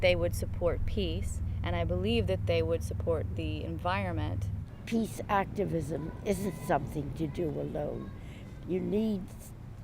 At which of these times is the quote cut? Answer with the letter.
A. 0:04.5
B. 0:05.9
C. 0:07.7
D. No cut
A